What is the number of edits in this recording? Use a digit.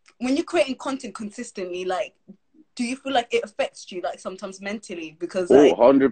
0